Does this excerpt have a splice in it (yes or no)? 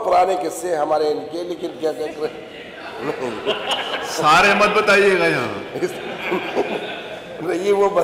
no